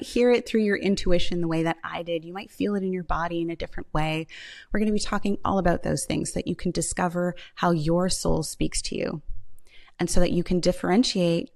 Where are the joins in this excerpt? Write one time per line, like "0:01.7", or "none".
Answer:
none